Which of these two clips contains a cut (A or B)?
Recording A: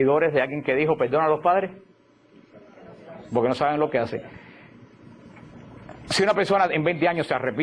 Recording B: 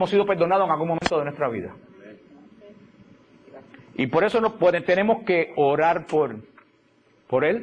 B